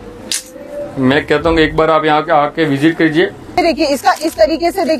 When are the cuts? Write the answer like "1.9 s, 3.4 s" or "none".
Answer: 3.6 s